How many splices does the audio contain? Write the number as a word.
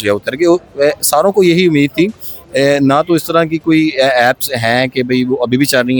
zero